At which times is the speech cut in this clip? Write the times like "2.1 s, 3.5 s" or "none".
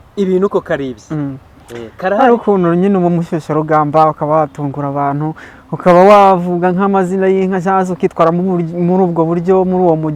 none

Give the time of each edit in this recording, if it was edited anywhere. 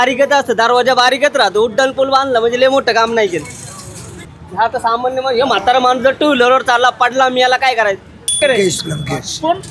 4.4 s, 8.4 s

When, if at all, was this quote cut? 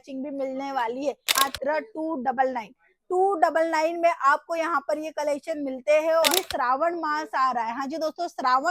1.3 s, 6.3 s

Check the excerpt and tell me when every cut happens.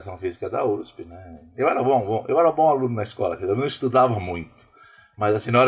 none

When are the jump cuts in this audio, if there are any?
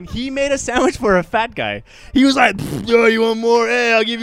none

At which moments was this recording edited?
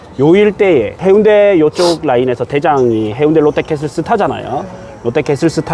0.9 s

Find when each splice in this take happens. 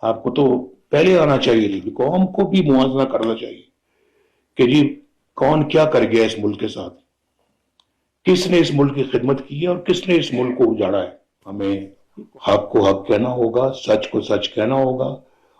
1.9 s, 11.4 s

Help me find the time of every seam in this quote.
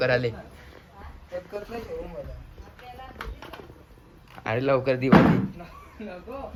none

